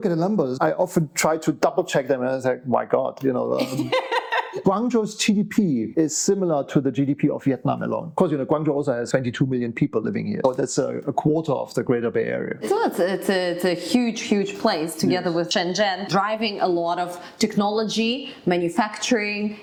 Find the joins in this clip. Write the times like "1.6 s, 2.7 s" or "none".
none